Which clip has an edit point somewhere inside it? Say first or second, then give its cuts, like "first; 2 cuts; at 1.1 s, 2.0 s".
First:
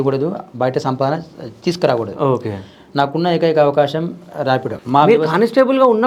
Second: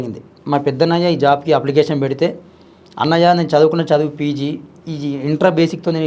first; 1 cut; at 4.8 s